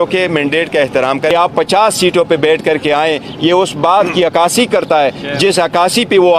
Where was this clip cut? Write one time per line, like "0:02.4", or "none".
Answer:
0:01.3